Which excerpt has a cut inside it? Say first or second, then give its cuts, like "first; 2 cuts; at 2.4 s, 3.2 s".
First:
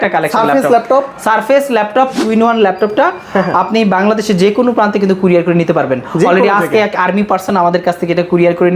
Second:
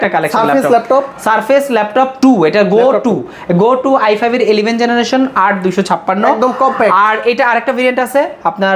first; 1 cut; at 2.2 s